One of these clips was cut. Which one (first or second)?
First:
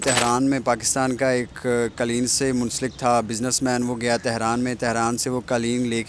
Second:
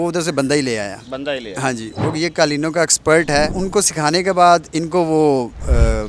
second